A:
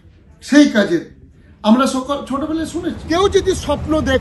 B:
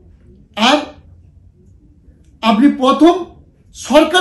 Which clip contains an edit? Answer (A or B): A